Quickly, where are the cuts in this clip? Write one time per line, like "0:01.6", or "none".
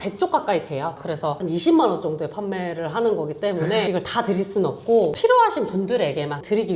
none